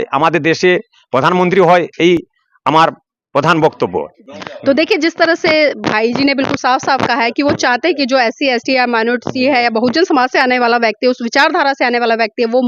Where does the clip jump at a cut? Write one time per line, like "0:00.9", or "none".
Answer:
none